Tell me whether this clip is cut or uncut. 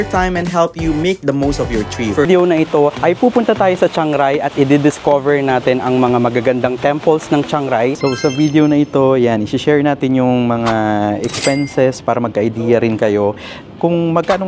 cut